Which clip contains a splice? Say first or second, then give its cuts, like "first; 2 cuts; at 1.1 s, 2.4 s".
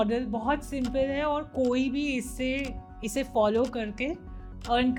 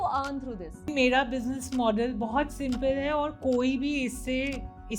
second; 1 cut; at 0.9 s